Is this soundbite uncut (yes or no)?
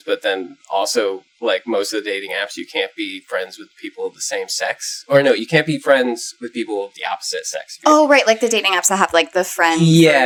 yes